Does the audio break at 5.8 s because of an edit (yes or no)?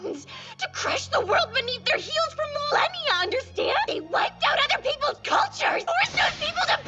yes